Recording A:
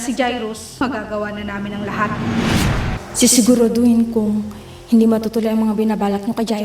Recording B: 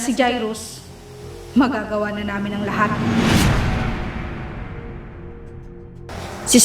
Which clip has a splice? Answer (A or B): A